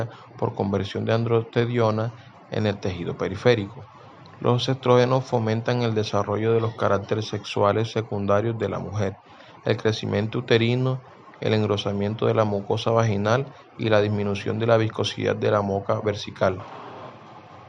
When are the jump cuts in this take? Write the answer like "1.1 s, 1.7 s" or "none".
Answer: 16.6 s